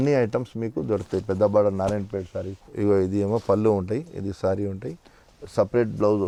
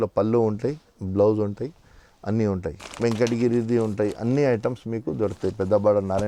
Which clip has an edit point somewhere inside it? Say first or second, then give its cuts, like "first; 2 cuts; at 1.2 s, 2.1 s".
second; 1 cut; at 2.9 s